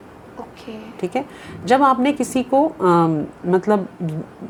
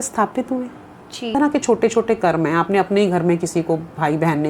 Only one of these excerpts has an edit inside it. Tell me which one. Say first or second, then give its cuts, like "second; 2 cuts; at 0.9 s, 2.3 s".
second; 1 cut; at 1.2 s